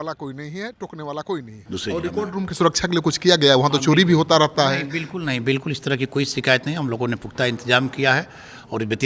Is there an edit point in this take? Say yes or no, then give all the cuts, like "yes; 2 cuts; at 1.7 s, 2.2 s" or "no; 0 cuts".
yes; 1 cut; at 1.6 s